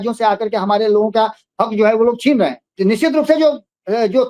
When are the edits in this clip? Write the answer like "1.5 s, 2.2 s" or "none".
2.7 s

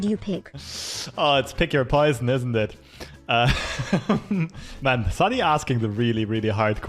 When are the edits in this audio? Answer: 4.6 s

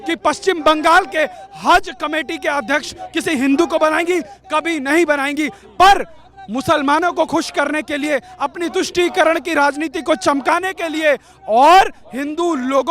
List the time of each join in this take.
none

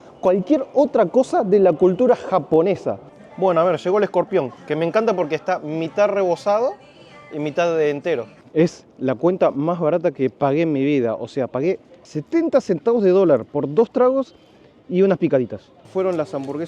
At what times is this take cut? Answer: 3.0 s, 8.4 s, 12.1 s, 15.9 s

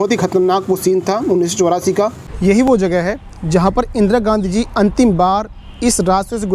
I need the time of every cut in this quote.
2.2 s

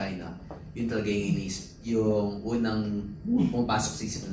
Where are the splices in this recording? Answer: none

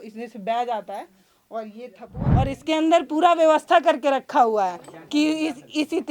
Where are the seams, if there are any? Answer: 2.2 s

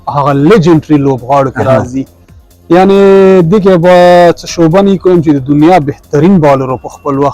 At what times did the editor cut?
none

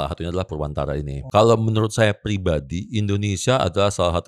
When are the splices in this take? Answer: 1.2 s

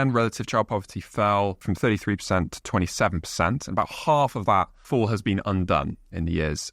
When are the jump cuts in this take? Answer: 1.6 s, 4.8 s

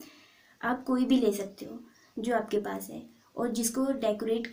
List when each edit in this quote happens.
none

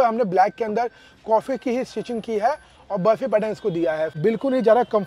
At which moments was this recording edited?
4.1 s

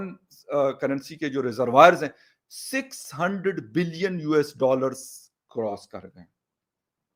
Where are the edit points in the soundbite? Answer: none

